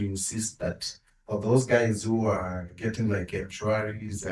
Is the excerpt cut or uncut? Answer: uncut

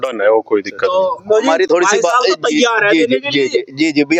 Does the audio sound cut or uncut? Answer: uncut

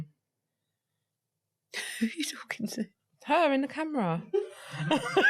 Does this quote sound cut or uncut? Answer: uncut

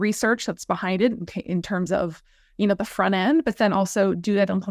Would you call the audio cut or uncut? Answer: uncut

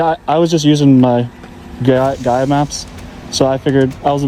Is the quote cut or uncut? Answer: uncut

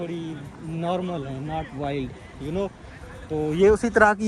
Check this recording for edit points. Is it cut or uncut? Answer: uncut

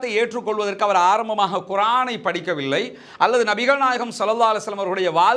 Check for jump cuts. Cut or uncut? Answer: uncut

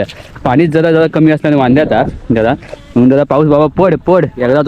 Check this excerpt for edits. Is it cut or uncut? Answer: uncut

